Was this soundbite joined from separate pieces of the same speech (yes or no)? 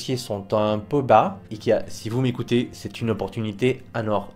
yes